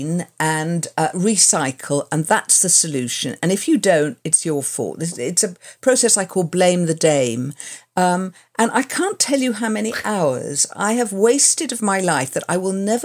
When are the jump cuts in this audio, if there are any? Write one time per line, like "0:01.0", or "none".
none

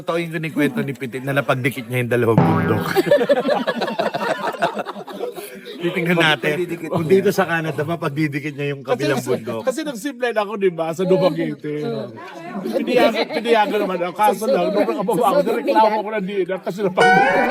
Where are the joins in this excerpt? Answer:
none

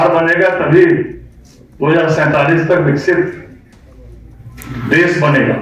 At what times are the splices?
none

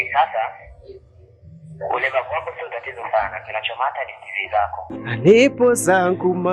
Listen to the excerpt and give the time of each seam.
0:04.8

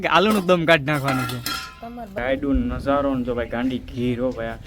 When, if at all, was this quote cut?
0:02.2

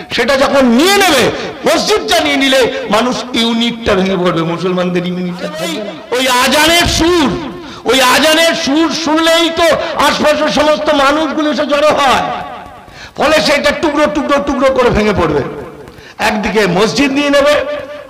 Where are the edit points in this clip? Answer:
0:05.9

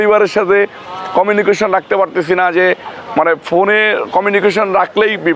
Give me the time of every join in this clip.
none

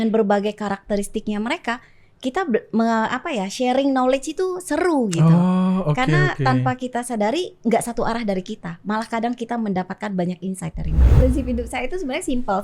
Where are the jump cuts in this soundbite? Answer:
0:11.2

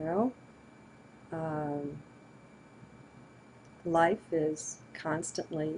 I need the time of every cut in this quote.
none

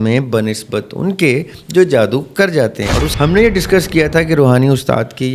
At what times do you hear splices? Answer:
0:03.1

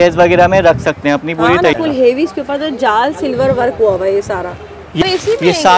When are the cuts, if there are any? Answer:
0:01.7
0:05.0

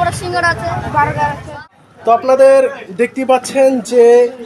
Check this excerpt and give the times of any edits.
0:01.5

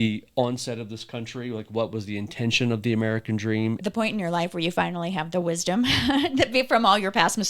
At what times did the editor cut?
0:03.8

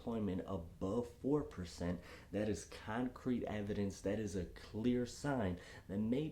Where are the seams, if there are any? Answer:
none

